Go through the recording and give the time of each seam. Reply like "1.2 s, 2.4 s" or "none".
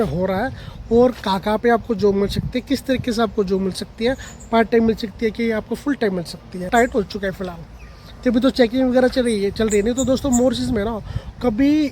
6.7 s